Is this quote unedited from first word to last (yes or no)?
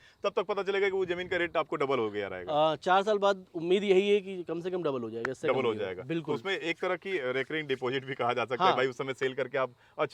yes